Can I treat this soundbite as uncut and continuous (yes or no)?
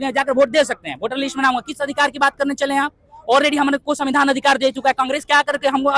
yes